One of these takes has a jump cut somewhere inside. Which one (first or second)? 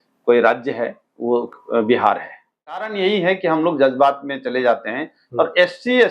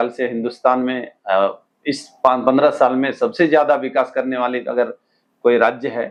first